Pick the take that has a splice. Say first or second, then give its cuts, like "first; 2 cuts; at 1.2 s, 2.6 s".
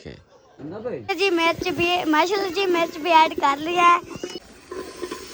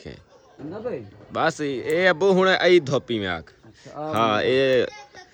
first; 2 cuts; at 1.1 s, 4.4 s